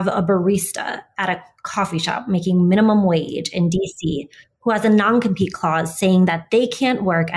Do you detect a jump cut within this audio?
no; 0 cuts

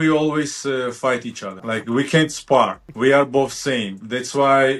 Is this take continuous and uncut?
no; 2 cuts; at 1.5 s, 2.8 s

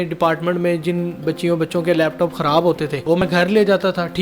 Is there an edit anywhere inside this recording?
yes; 1 cut; at 3.2 s

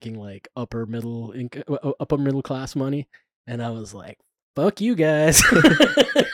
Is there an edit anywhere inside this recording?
no; 0 cuts

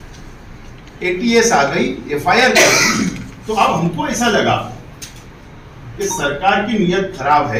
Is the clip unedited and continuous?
yes; 0 cuts

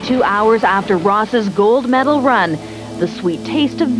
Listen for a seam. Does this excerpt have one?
no; 0 cuts

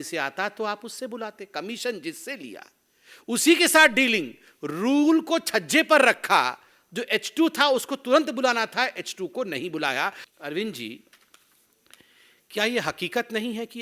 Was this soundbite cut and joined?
yes; 1 cut; at 10.3 s

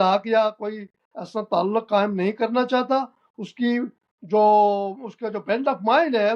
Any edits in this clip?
no; 0 cuts

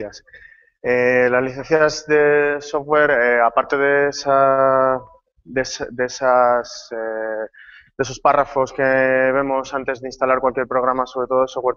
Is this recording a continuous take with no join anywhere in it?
no; 1 cut; at 5.6 s

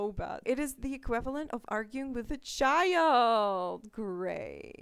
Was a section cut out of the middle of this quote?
no; 0 cuts

